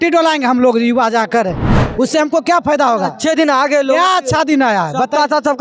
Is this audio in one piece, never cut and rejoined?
yes; 0 cuts

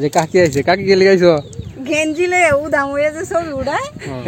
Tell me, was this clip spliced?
no; 0 cuts

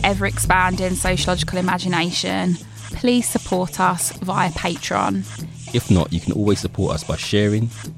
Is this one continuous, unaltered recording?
yes; 0 cuts

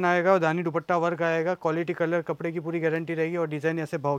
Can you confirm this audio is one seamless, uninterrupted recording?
yes; 0 cuts

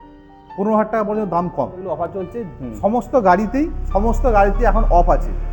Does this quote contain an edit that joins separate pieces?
yes; 1 cut; at 1.8 s

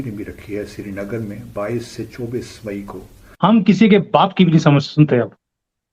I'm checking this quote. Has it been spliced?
yes; 1 cut; at 3.3 s

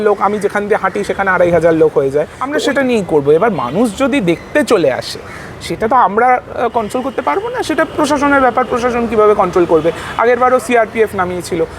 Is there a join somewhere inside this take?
yes; 1 cut; at 2.4 s

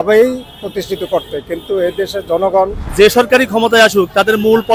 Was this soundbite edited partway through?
yes; 1 cut; at 2.8 s

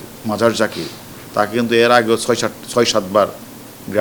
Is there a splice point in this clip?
no; 0 cuts

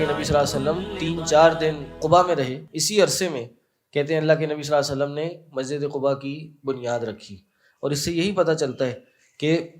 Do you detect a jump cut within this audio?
yes; 3 cuts; at 0.9 s, 2.0 s, 2.7 s

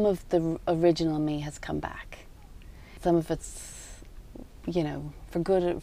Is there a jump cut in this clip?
yes; 1 cut; at 3.0 s

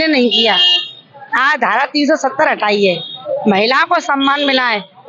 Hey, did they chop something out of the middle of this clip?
no; 0 cuts

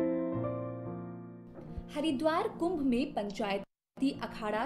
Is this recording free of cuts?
yes; 0 cuts

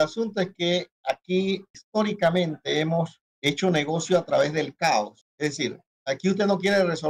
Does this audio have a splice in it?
yes; 3 cuts; at 1.7 s, 3.2 s, 5.6 s

